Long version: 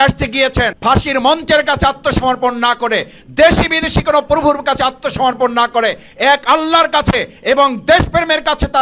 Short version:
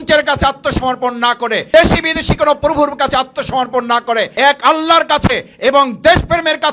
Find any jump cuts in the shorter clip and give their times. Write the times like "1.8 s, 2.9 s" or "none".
1.7 s, 4.3 s